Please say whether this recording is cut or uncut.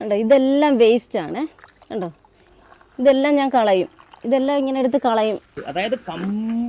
cut